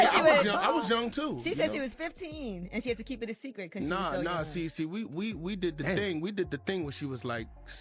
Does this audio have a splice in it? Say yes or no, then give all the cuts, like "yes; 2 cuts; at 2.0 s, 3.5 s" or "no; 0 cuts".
no; 0 cuts